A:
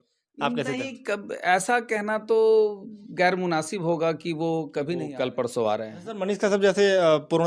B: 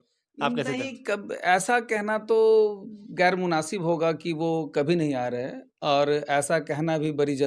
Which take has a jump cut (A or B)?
A